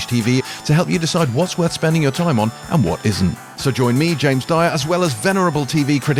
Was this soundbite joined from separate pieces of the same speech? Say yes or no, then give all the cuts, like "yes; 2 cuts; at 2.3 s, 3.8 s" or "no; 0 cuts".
no; 0 cuts